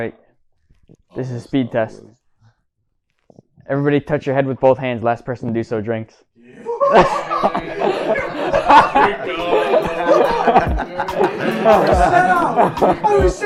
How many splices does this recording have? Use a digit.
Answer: 0